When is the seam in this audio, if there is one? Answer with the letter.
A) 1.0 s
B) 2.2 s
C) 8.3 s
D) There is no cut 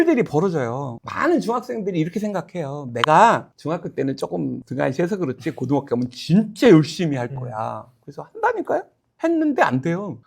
A